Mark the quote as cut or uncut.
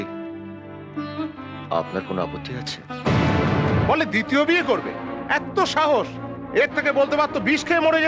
cut